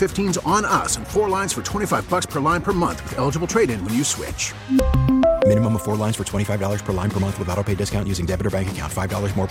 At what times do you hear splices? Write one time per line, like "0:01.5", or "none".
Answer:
none